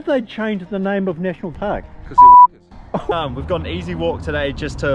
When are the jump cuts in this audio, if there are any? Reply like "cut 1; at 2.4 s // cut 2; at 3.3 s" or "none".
cut 1; at 1.6 s // cut 2; at 2.8 s